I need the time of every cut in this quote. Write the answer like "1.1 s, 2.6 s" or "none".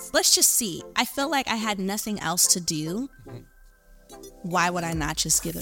none